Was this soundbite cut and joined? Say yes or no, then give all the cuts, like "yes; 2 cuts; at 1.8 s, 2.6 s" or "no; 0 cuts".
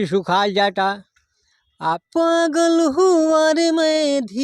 yes; 1 cut; at 2.0 s